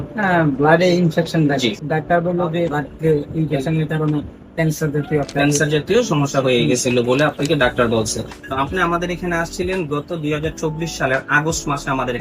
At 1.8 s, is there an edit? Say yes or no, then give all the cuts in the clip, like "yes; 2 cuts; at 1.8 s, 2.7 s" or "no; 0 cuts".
yes; 3 cuts; at 1.8 s, 2.8 s, 8.4 s